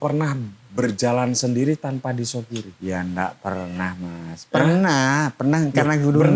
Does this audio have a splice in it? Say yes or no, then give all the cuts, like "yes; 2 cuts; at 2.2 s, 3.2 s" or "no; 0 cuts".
no; 0 cuts